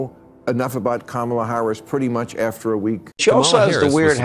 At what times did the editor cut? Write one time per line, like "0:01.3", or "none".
0:03.1

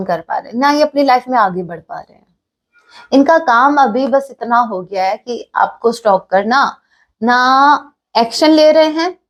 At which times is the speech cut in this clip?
none

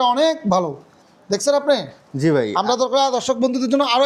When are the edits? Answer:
none

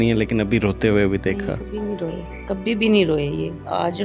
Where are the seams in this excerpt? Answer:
none

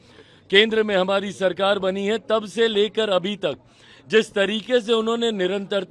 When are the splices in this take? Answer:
none

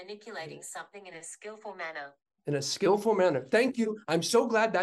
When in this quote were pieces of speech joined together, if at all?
none

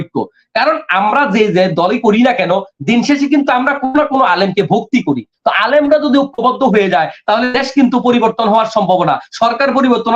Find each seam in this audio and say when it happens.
none

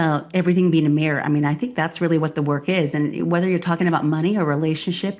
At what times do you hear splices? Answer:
none

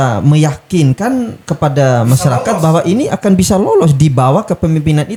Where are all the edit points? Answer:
none

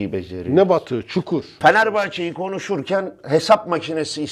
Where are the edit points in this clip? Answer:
0:01.5

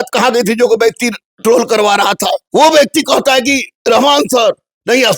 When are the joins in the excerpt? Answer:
0:01.4
0:02.4
0:03.7

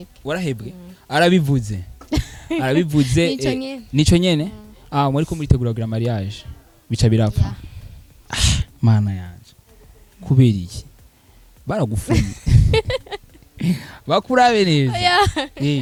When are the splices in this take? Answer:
none

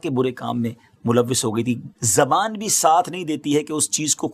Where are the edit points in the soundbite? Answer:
0:01.9

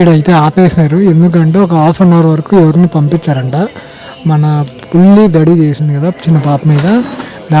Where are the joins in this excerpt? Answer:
none

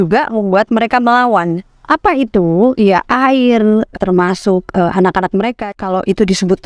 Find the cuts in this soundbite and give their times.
0:01.7
0:03.9
0:05.7

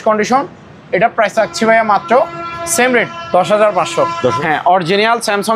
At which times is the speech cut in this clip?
0:04.4

